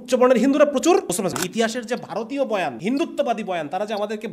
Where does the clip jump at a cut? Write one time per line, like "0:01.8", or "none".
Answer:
0:01.4
0:02.8